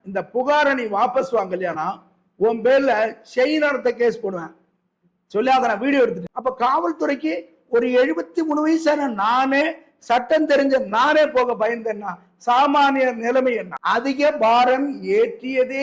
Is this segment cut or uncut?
cut